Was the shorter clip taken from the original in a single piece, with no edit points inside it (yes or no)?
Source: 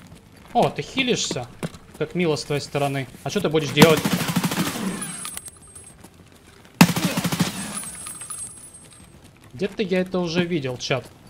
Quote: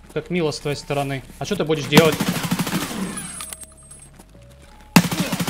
yes